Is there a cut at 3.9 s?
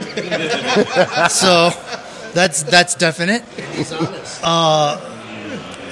no; 0 cuts

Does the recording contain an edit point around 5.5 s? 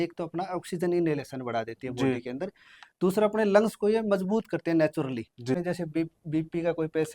yes; 1 cut; at 5.5 s

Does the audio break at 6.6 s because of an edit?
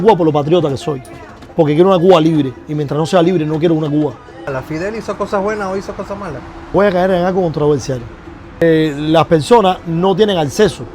yes; 3 cuts; at 4.4 s, 6.6 s, 8.6 s

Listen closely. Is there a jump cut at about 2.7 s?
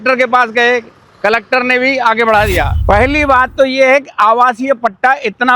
yes; 1 cut; at 2.7 s

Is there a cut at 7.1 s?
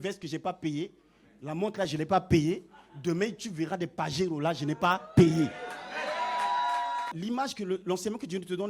yes; 1 cut; at 7.1 s

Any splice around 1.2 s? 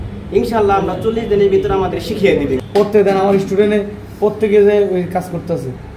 no; 1 cut; at 2.6 s

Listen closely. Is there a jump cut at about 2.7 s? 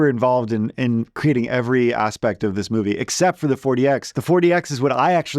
no; 1 cut; at 4.1 s

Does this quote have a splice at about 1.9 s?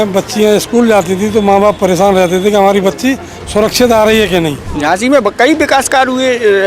no; 1 cut; at 4.7 s

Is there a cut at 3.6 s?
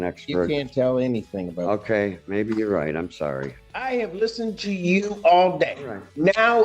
yes; 1 cut; at 3.6 s

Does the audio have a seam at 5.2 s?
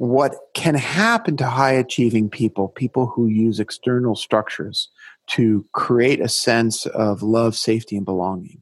no; 0 cuts

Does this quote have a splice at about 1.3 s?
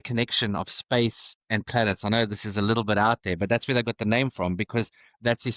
yes; 1 cut; at 1.3 s

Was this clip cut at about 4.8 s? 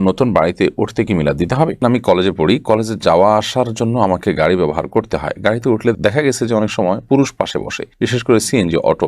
no; 1 cut; at 1.8 s

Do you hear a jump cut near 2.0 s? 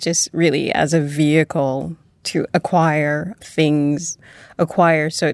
no; 1 cut; at 4.2 s

